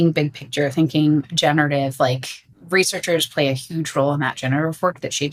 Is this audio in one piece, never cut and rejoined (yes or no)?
yes